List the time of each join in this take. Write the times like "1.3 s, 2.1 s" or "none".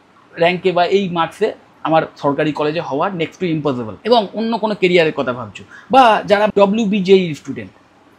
3.9 s, 6.5 s